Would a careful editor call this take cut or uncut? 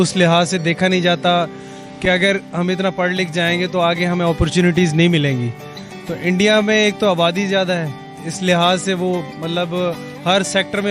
uncut